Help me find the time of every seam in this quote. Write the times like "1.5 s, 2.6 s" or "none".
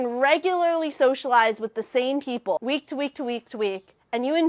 2.6 s